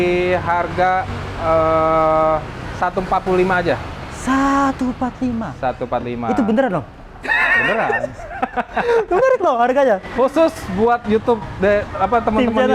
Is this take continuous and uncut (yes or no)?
yes